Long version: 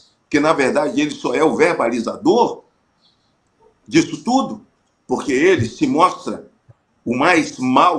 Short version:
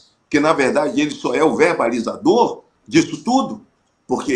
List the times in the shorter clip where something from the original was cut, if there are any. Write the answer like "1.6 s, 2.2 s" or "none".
2.7 s